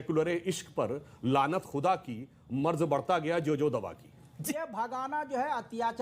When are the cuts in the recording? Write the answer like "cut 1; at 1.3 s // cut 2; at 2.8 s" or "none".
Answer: cut 1; at 4.4 s